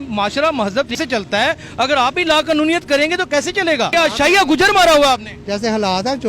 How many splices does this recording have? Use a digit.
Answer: 2